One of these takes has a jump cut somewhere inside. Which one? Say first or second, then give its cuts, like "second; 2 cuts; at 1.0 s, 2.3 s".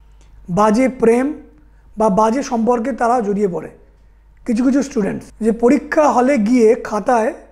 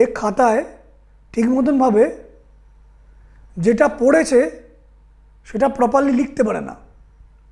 first; 1 cut; at 5.3 s